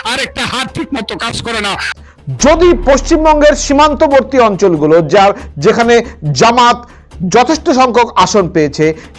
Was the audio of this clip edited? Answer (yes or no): yes